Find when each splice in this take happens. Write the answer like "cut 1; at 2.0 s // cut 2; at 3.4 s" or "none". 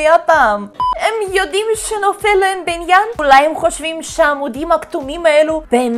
cut 1; at 0.9 s // cut 2; at 3.2 s